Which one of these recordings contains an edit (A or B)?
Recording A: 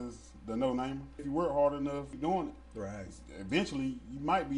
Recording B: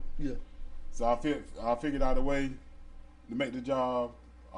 A